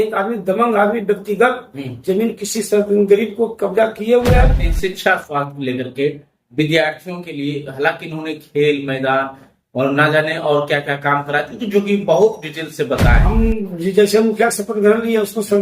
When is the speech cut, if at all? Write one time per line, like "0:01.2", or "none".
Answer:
0:04.6
0:13.2